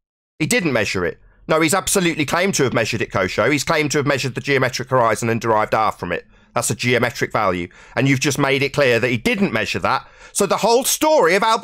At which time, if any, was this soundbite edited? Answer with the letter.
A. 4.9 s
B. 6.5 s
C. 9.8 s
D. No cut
D